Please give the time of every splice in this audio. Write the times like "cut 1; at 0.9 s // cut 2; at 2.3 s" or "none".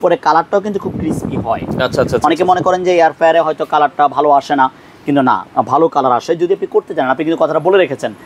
none